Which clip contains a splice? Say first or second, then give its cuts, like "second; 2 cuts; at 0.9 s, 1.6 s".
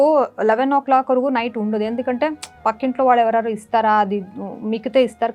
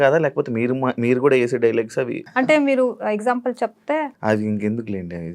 second; 2 cuts; at 2.3 s, 4.1 s